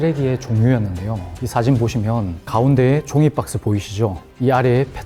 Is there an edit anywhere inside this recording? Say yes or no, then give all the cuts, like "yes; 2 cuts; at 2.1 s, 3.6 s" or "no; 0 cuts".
yes; 1 cut; at 1.3 s